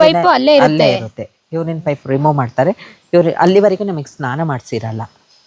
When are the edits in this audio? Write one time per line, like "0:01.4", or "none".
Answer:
none